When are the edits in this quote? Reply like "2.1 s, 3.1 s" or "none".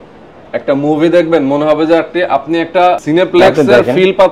3.0 s